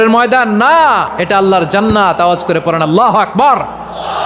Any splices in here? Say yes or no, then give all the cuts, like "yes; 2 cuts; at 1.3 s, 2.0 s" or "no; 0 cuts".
yes; 1 cut; at 1.1 s